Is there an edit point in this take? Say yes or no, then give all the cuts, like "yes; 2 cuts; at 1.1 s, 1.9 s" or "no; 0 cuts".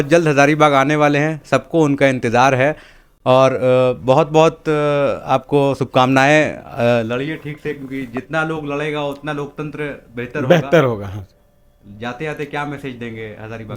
no; 0 cuts